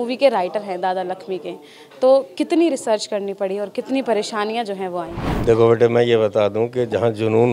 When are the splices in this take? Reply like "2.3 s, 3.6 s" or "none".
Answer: 5.2 s